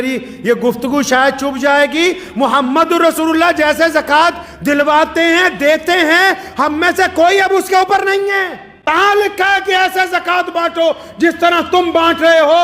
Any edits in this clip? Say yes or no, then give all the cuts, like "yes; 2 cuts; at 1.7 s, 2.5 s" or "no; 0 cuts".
yes; 1 cut; at 8.9 s